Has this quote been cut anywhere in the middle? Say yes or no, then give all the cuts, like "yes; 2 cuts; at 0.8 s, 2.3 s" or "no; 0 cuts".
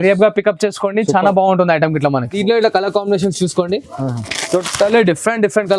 yes; 1 cut; at 2.3 s